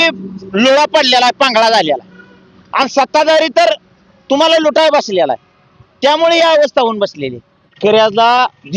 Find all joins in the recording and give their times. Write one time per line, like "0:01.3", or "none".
0:07.7